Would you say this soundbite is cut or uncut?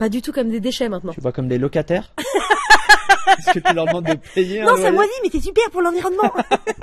uncut